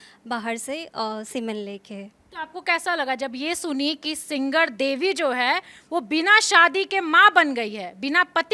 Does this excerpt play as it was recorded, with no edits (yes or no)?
yes